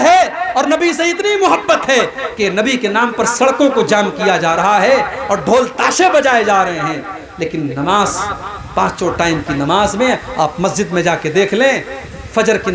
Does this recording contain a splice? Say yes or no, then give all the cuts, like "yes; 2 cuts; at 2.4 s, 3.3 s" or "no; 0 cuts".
no; 0 cuts